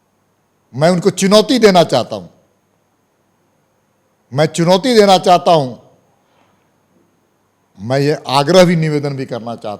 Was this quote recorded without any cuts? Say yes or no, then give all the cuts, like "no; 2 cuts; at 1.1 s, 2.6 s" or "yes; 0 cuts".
yes; 0 cuts